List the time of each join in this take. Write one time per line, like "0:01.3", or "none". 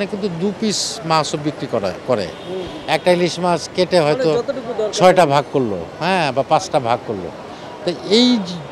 none

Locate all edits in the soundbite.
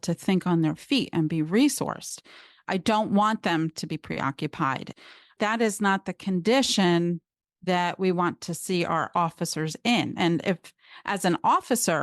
0:05.0

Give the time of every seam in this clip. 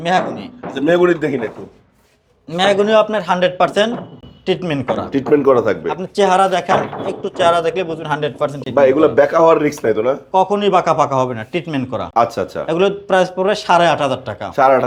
none

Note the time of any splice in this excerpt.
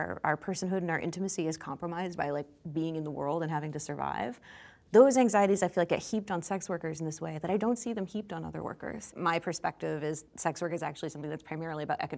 0:09.1

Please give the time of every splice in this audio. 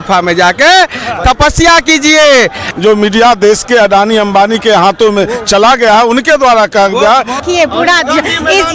0:02.6
0:07.4

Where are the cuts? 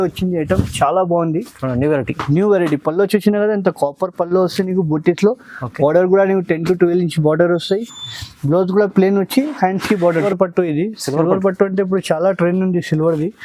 0:10.3

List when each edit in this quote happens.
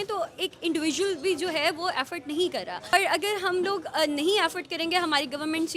0:02.9

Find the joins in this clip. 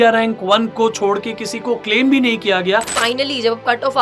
0:03.0

